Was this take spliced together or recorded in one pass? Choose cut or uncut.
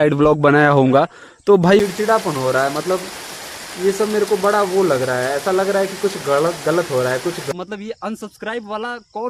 cut